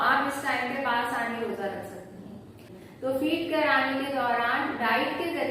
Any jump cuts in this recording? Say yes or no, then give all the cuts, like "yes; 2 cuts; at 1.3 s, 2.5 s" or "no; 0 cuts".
yes; 1 cut; at 2.7 s